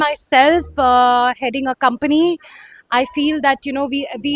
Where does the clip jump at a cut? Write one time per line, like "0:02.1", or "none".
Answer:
none

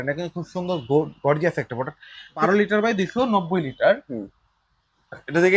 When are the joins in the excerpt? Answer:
0:02.4

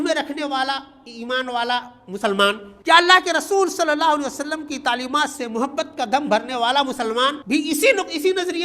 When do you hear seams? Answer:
0:02.7
0:07.4

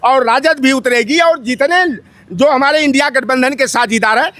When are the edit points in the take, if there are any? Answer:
none

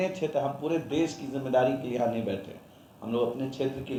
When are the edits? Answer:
none

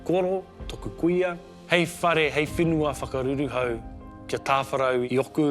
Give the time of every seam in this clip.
0:01.5

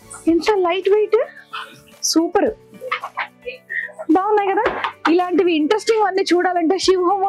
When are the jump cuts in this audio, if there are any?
none

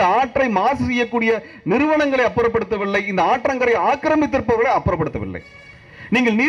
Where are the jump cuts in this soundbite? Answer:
none

